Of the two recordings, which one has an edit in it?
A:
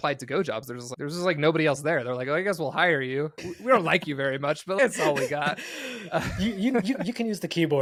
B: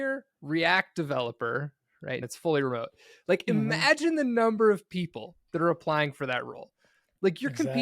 B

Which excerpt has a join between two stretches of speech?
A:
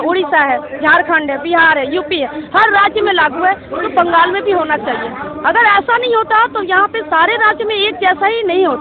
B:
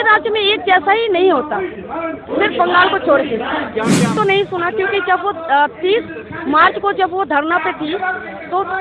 B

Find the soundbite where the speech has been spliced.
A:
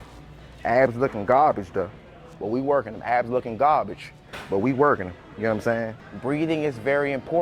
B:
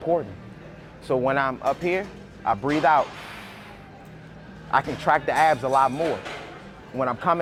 A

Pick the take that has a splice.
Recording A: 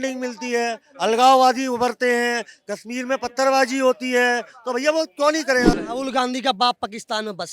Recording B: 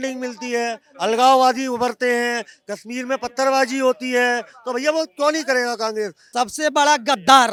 A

